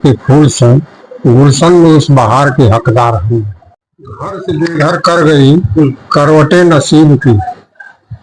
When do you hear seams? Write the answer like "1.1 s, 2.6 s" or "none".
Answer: 3.7 s